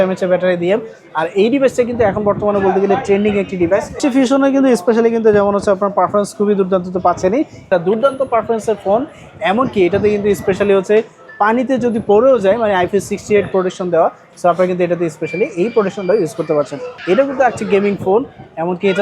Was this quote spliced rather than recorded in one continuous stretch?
yes; 3 cuts; at 4.0 s, 7.7 s, 16.9 s

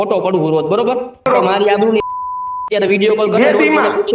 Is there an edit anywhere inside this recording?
yes; 1 cut; at 1.3 s

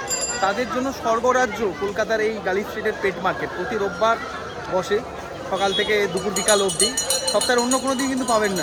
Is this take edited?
no; 0 cuts

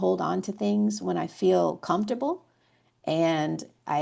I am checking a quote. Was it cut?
no; 0 cuts

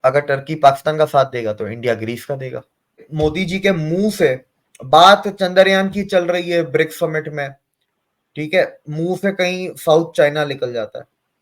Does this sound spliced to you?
yes; 1 cut; at 3.1 s

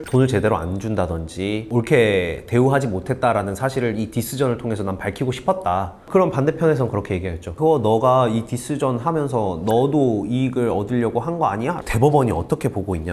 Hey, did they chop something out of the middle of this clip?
yes; 3 cuts; at 6.0 s, 7.5 s, 11.8 s

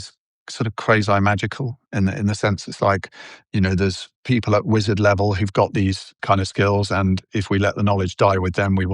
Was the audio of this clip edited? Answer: yes; 3 cuts; at 4.1 s, 6.2 s, 7.3 s

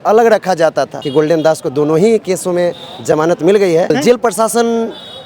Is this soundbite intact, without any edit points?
no; 2 cuts; at 1.0 s, 3.9 s

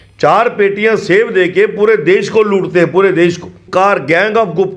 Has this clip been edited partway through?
yes; 1 cut; at 3.6 s

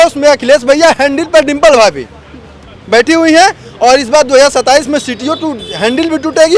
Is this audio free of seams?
yes; 0 cuts

